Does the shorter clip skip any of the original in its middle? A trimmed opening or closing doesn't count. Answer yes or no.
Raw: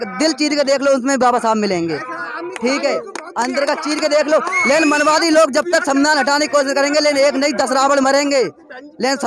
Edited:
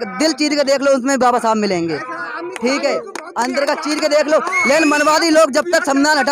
no